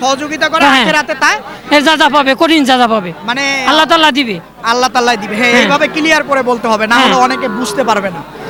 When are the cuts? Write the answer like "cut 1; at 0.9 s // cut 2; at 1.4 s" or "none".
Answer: none